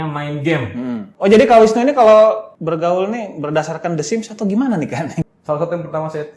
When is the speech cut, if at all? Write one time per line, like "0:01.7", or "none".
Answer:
0:01.0
0:02.5
0:05.2